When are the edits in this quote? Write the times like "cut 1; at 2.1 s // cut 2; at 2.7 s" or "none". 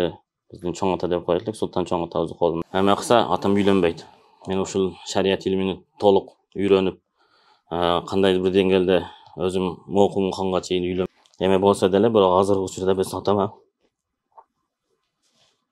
cut 1; at 2.6 s // cut 2; at 11.1 s